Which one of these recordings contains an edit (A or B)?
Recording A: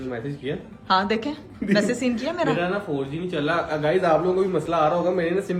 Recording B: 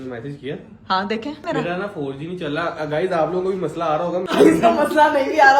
B